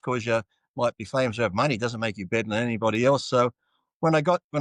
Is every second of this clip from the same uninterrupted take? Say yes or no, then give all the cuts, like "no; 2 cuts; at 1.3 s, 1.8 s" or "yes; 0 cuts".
yes; 0 cuts